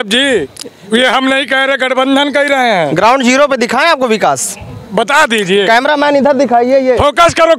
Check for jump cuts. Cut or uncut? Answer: uncut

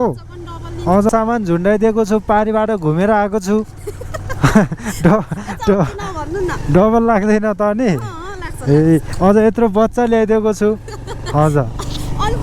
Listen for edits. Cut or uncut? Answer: cut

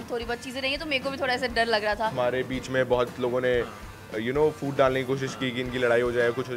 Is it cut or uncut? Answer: cut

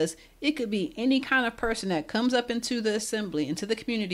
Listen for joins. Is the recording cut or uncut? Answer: uncut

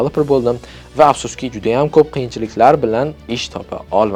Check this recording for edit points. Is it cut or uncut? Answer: uncut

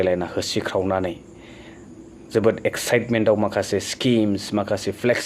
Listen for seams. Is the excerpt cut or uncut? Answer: uncut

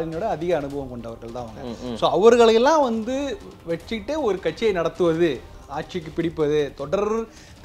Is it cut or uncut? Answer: uncut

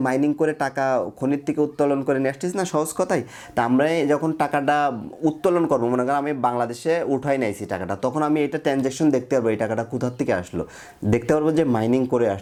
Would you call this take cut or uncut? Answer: uncut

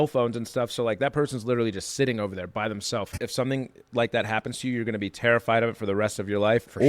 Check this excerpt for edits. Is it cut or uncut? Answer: cut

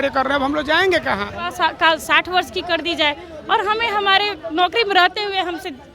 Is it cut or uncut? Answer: cut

